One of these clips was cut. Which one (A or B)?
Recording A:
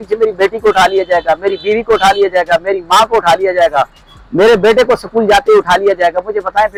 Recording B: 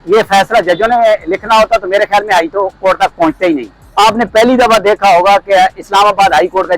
B